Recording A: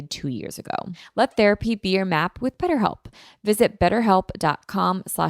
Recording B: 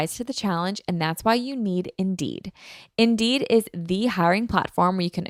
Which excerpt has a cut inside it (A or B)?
A